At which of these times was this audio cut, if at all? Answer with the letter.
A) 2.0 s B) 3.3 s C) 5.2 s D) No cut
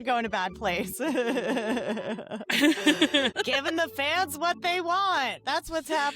B